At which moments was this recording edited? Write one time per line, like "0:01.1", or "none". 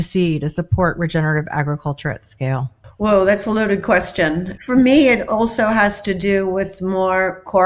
0:02.8
0:04.5